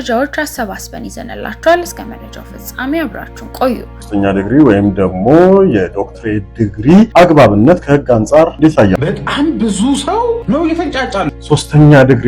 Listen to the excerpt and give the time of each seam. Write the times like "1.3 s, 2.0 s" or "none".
4.0 s, 7.1 s, 8.6 s, 10.4 s, 11.3 s